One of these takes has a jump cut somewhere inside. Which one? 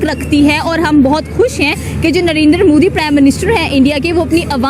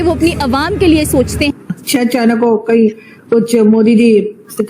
second; 1 cut; at 1.6 s

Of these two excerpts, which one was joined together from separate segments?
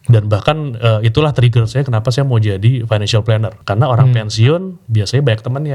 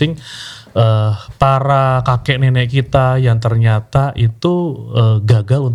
first; 1 cut; at 3.5 s

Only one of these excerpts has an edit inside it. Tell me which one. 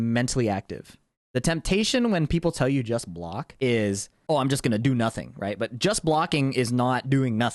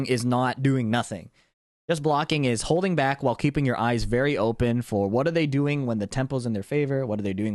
first; 2 cuts; at 3.4 s, 4.1 s

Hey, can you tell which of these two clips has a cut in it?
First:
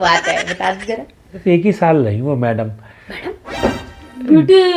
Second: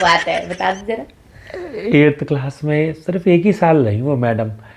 first; 1 cut; at 1.3 s

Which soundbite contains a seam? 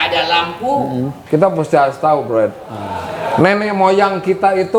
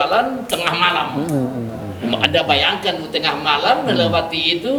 first; 1 cut; at 1.2 s

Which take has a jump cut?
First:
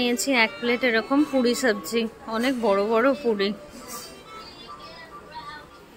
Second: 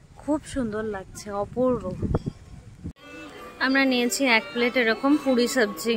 second; 1 cut; at 3.0 s

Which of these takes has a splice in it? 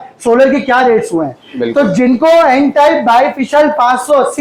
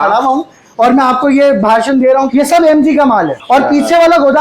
second; 2 cuts; at 2.3 s, 3.4 s

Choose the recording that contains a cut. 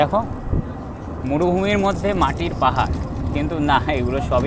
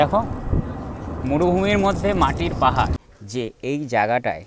second; 1 cut; at 3.1 s

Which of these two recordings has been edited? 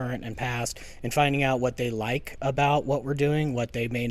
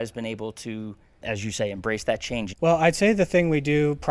second; 2 cuts; at 1.2 s, 2.5 s

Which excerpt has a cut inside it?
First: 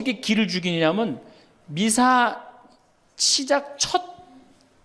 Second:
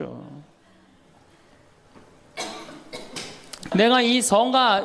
second; 1 cut; at 3.7 s

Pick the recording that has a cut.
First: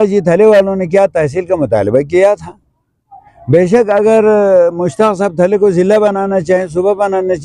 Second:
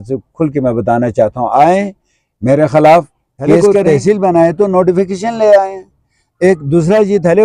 second; 1 cut; at 3.6 s

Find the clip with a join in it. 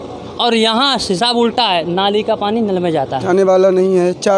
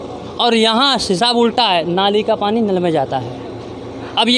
first; 1 cut; at 3.2 s

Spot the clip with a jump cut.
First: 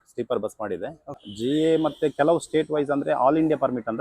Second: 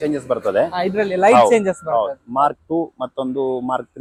first; 1 cut; at 1.3 s

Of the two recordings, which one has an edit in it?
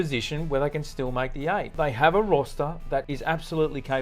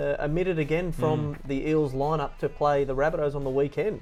first; 2 cuts; at 1.7 s, 3.1 s

